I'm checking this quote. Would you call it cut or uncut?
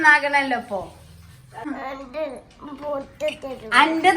cut